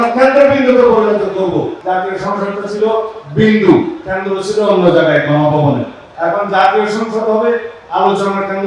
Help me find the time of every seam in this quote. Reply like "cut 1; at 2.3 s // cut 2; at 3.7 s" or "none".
cut 1; at 1.8 s // cut 2; at 6.0 s